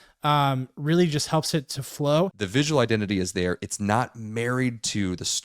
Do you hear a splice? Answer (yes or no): yes